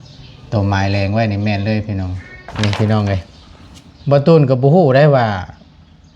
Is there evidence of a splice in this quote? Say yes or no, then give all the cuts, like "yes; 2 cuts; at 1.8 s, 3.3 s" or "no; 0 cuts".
yes; 1 cut; at 2.5 s